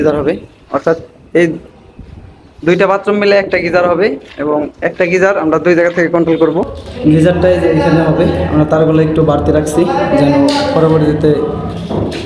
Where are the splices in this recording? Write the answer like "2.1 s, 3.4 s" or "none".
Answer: 6.8 s